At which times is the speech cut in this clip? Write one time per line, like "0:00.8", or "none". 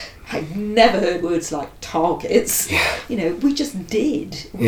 0:01.2